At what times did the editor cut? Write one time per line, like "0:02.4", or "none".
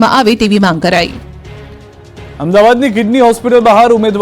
0:01.0